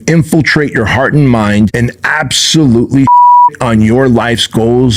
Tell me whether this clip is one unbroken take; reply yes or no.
no